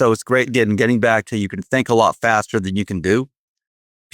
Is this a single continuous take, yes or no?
yes